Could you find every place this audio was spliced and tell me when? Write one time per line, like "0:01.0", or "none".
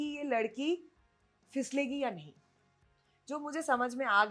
none